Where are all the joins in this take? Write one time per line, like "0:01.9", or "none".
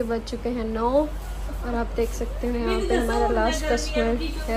none